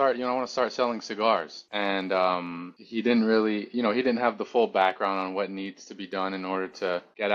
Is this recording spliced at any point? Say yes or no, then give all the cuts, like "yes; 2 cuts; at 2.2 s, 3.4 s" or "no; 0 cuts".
no; 0 cuts